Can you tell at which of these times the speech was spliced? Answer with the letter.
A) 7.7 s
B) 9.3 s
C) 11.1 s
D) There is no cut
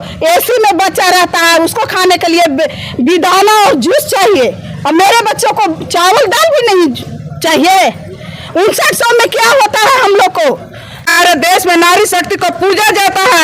C